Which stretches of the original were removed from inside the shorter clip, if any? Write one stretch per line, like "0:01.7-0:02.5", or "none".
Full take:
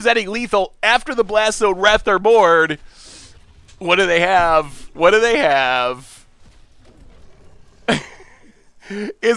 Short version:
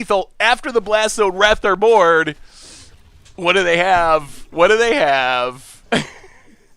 0:06.1-0:07.7